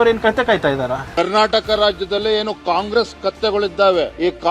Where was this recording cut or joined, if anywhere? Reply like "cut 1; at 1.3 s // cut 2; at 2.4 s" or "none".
cut 1; at 1.1 s